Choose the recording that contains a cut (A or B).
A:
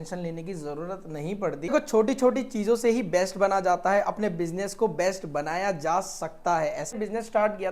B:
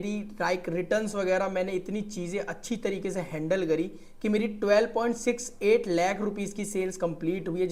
A